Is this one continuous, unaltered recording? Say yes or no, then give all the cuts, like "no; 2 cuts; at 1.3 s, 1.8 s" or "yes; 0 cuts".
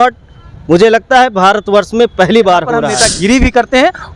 no; 1 cut; at 2.9 s